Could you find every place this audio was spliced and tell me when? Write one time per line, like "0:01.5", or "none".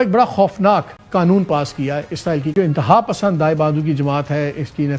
0:02.5